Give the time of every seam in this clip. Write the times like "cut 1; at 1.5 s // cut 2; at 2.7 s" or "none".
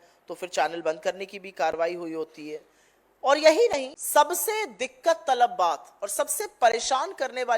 cut 1; at 3.9 s